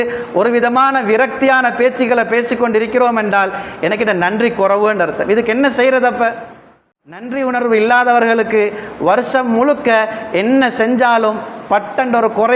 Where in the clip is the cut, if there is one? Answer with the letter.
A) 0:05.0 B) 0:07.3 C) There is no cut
B